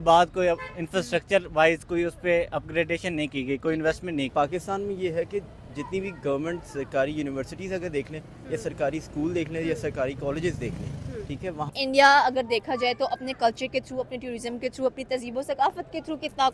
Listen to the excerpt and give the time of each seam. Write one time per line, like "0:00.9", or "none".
0:04.3
0:11.7